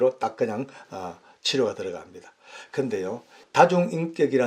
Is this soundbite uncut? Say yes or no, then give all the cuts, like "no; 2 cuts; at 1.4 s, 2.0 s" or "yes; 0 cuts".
no; 1 cut; at 3.3 s